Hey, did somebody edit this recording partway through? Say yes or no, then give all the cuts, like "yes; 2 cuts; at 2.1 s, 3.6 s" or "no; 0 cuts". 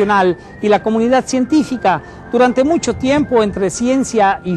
yes; 1 cut; at 3.5 s